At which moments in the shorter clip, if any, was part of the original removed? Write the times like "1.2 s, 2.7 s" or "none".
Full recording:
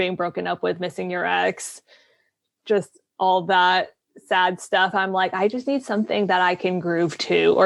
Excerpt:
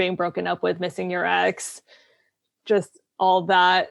none